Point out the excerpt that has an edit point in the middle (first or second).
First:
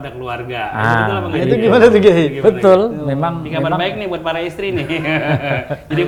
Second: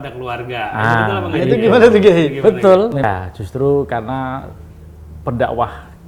second